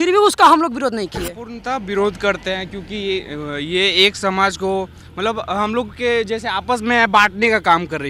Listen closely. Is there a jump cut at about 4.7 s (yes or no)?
no